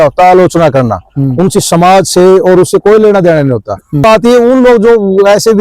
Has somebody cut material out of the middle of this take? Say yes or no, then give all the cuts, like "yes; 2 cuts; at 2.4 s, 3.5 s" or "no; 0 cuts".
yes; 1 cut; at 4.0 s